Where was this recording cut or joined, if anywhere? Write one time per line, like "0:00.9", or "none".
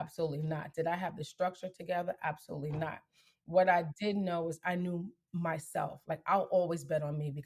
none